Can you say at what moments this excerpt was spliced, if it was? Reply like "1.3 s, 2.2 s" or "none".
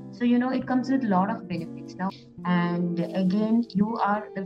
2.1 s